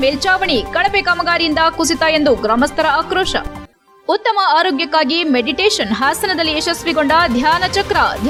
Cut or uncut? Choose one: uncut